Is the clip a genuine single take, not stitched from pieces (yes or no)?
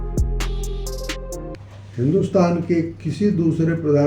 no